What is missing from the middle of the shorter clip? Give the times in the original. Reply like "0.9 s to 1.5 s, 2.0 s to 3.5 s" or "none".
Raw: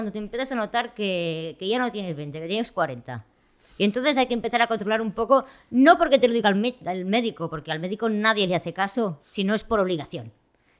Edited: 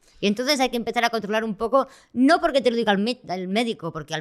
none